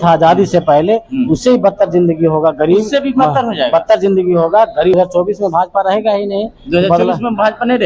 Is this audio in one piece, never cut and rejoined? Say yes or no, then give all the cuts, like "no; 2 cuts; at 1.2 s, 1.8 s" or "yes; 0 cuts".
no; 1 cut; at 5.0 s